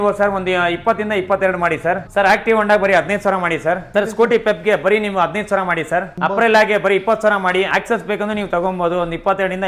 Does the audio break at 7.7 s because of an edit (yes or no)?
yes